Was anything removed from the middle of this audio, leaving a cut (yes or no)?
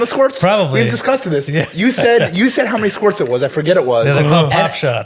no